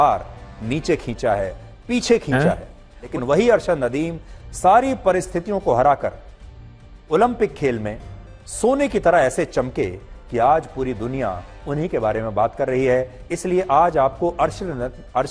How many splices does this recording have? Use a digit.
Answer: 0